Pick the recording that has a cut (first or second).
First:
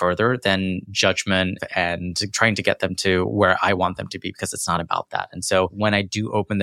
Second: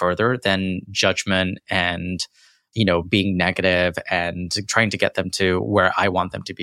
first